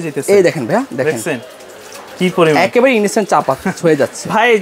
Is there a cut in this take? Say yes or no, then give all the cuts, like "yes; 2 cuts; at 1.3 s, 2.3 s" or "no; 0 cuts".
no; 0 cuts